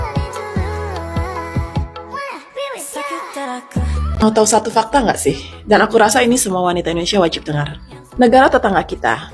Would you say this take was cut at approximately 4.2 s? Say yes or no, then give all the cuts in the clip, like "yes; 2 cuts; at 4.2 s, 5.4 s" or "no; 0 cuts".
yes; 1 cut; at 4.2 s